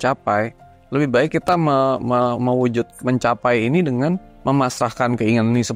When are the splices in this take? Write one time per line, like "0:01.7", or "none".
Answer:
none